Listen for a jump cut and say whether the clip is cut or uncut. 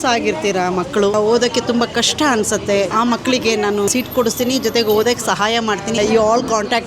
cut